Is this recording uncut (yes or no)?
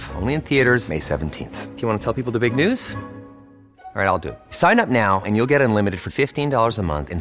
yes